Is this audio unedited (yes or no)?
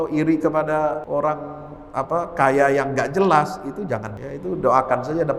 no